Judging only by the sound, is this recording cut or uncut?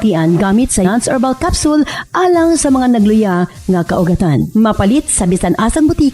uncut